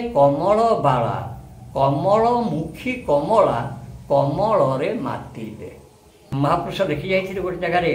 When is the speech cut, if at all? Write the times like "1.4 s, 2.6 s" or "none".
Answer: 6.3 s